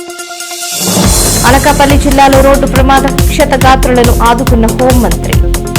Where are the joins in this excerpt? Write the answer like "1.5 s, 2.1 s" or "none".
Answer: none